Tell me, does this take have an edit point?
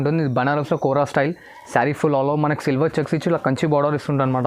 no; 0 cuts

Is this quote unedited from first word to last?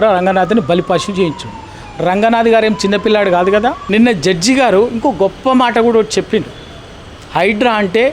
no; 1 cut; at 3.8 s

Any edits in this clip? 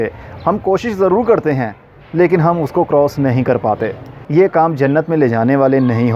yes; 1 cut; at 4.2 s

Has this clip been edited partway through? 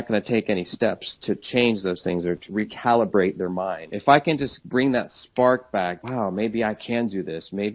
yes; 4 cuts; at 2.5 s, 3.9 s, 4.6 s, 6.0 s

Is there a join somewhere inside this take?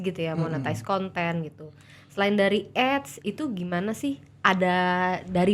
no; 0 cuts

